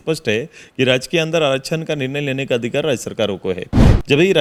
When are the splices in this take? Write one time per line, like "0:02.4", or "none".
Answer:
none